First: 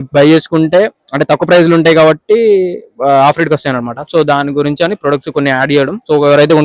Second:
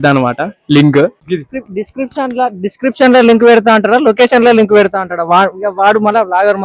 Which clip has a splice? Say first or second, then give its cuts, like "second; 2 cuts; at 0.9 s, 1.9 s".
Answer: second; 1 cut; at 1.2 s